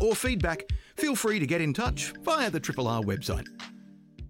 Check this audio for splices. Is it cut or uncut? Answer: cut